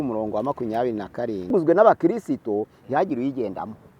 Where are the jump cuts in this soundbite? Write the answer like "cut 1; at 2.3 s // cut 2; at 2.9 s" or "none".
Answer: cut 1; at 1.5 s